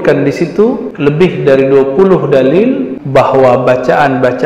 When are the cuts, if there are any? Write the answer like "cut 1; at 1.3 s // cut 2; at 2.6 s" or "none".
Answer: cut 1; at 0.9 s // cut 2; at 2.9 s